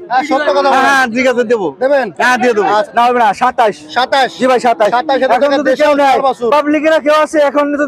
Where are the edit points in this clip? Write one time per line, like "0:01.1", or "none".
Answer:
0:02.9